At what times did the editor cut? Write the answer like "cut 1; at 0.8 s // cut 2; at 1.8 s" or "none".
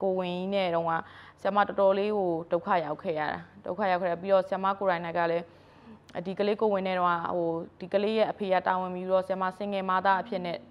none